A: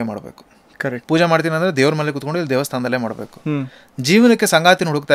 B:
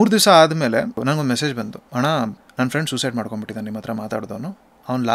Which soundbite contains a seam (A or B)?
B